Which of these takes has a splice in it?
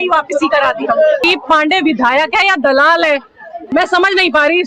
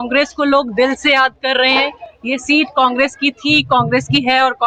first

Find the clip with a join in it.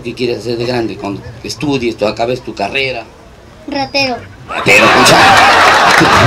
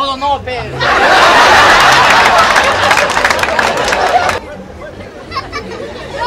second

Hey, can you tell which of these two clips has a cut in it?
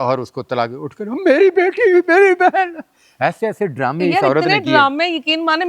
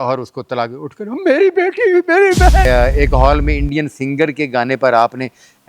second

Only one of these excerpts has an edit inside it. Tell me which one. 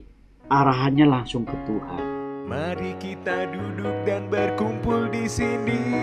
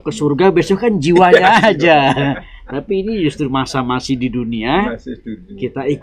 first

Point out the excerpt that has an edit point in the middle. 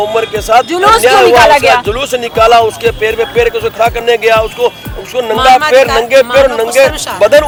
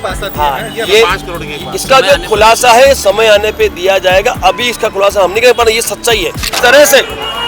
second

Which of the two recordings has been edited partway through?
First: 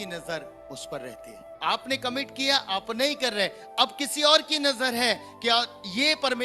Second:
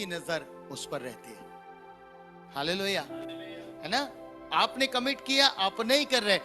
first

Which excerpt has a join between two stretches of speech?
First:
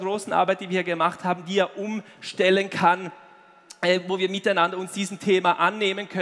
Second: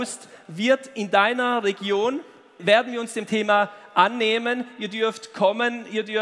second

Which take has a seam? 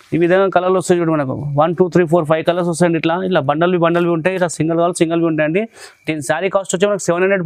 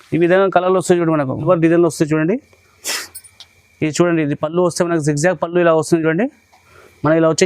second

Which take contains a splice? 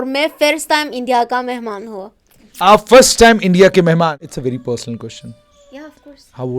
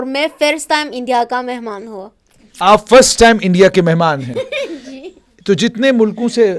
first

